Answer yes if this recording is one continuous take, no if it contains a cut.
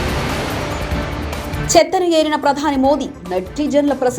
no